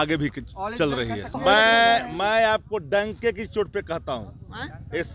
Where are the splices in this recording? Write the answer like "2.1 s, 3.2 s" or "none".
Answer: 1.3 s